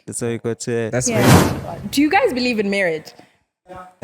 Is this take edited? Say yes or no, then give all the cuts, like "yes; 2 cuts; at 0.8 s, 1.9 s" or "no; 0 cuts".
yes; 1 cut; at 1.4 s